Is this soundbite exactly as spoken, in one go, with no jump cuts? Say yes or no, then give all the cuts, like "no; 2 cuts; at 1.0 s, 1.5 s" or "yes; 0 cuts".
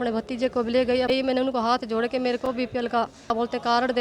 no; 2 cuts; at 1.1 s, 3.3 s